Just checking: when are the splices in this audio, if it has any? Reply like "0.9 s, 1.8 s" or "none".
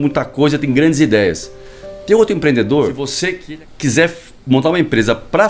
3.3 s